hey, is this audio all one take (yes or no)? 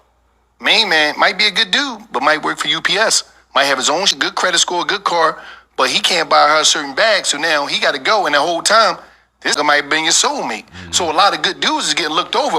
no